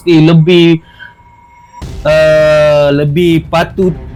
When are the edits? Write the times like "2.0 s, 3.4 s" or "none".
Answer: none